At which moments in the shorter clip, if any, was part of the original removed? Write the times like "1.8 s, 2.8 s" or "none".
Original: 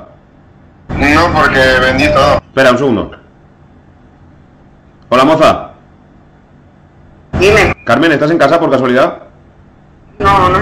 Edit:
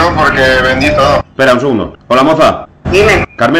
2.0 s, 2.7 s